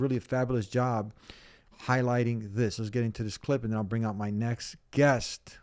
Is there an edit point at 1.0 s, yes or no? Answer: no